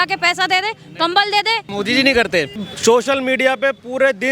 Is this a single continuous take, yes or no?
no